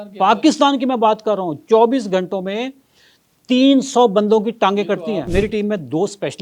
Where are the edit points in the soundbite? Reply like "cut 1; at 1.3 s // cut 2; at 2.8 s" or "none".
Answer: cut 1; at 5.0 s